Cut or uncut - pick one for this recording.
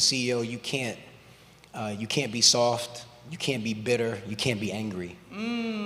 uncut